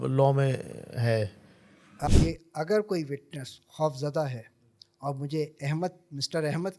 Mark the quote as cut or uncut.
cut